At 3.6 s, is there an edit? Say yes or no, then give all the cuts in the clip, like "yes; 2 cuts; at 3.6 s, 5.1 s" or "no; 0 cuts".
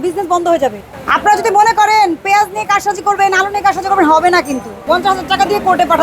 no; 2 cuts; at 0.9 s, 4.8 s